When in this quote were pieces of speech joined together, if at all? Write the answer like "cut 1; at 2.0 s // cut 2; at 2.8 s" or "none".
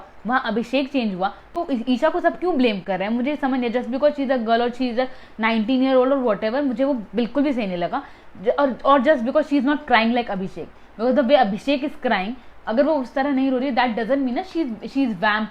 none